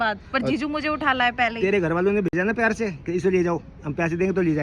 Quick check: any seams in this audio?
no; 0 cuts

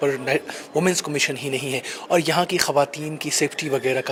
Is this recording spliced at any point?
no; 0 cuts

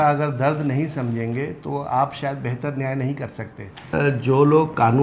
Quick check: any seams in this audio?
yes; 1 cut; at 3.9 s

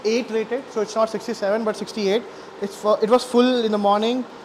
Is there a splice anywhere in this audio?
no; 0 cuts

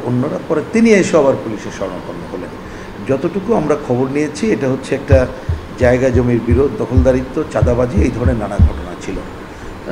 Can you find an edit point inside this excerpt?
no; 0 cuts

